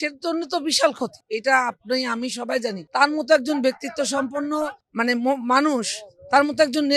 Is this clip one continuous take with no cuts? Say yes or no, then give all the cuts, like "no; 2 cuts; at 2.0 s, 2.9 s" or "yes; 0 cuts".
no; 3 cuts; at 1.2 s, 2.8 s, 4.8 s